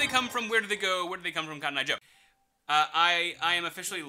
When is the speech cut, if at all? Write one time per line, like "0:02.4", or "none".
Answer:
0:02.1